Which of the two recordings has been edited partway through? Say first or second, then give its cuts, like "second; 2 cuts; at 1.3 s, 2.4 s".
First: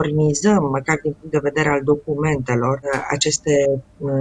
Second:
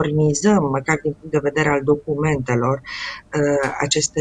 first; 1 cut; at 2.9 s